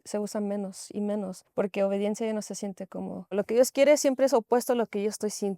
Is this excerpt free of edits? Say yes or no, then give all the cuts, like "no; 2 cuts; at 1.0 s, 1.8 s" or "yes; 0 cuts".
no; 2 cuts; at 1.4 s, 3.3 s